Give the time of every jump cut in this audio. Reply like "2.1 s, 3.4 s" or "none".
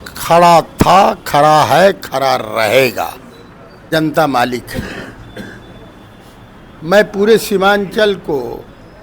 3.9 s